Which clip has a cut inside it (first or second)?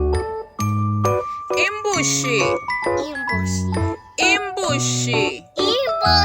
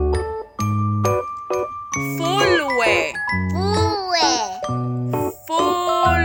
first